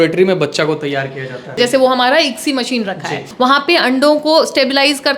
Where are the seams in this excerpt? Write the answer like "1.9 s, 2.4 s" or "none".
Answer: 1.5 s, 3.2 s